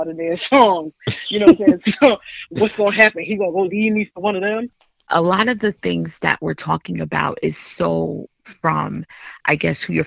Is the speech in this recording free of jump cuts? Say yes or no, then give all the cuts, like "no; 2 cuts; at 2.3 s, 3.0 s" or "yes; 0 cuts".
no; 1 cut; at 4.8 s